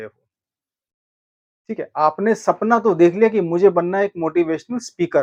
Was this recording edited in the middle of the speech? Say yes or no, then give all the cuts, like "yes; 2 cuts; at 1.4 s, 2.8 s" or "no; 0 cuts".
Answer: no; 0 cuts